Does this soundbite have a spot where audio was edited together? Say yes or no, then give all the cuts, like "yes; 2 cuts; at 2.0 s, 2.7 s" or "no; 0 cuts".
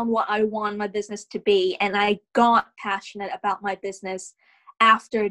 no; 0 cuts